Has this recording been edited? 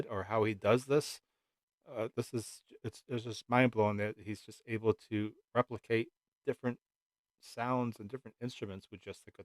no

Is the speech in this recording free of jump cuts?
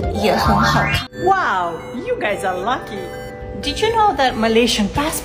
no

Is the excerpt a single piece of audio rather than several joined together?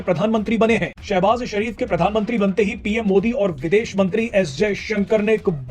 no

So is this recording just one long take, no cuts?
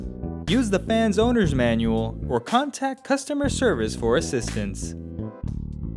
no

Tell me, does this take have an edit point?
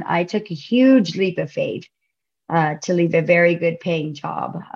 no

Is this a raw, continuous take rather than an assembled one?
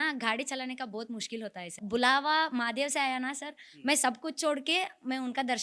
no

